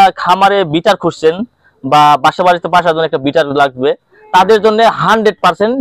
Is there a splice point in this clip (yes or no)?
no